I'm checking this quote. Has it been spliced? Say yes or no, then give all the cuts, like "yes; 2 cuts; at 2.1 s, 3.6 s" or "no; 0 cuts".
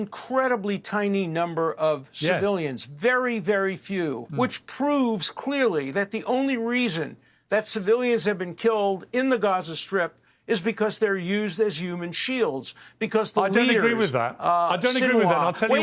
yes; 1 cut; at 4.2 s